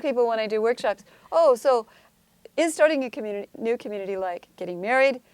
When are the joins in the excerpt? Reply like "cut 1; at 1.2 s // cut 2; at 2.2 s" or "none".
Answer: cut 1; at 2.0 s